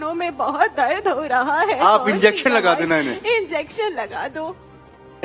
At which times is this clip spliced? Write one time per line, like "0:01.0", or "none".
none